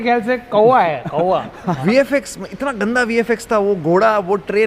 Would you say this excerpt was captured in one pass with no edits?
no; 1 cut; at 1.8 s

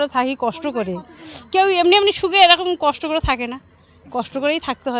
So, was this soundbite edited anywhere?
no; 0 cuts

